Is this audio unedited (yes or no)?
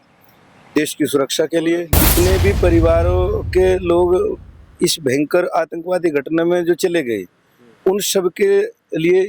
no